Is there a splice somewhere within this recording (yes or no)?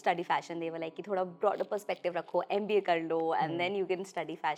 no